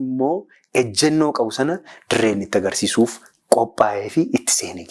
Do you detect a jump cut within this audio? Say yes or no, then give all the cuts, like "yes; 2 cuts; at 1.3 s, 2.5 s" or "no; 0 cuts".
no; 0 cuts